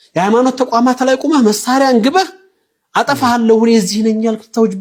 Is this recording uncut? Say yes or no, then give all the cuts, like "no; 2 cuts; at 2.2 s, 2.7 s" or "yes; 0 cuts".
yes; 0 cuts